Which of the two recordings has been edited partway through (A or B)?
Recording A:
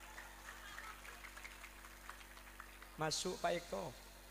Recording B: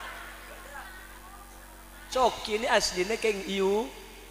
B